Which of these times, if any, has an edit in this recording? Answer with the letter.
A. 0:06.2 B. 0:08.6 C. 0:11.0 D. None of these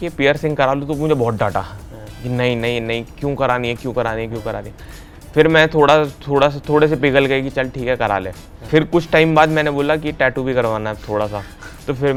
D